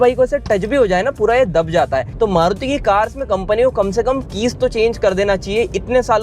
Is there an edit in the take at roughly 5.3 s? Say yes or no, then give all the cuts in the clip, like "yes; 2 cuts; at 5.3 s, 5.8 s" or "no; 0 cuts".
no; 1 cut; at 2.1 s